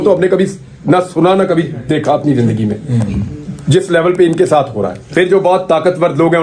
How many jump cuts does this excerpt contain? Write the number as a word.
one